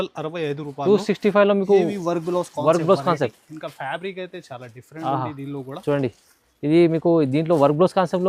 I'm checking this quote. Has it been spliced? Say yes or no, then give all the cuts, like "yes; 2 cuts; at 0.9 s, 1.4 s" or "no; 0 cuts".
no; 0 cuts